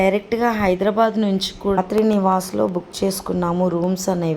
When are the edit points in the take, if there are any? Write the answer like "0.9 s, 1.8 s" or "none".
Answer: 1.8 s